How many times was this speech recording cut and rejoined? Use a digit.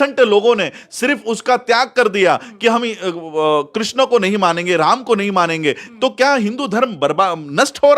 0